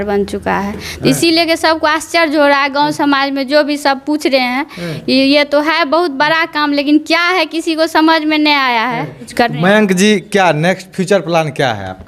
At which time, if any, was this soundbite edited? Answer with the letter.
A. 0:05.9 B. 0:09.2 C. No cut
B